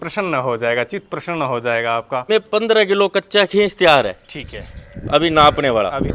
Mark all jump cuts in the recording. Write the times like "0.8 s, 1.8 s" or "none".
2.3 s